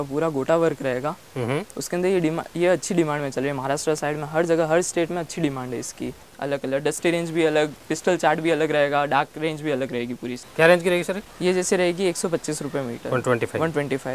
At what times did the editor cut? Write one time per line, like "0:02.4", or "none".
0:06.3
0:10.4